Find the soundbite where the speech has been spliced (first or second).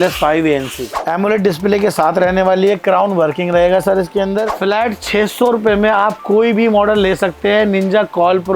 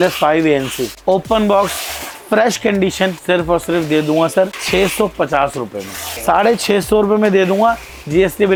first